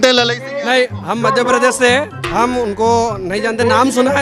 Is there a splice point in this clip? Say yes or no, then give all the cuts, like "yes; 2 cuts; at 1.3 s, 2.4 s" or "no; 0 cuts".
no; 0 cuts